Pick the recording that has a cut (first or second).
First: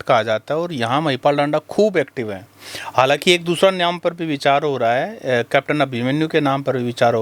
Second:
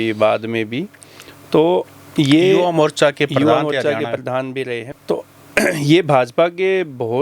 second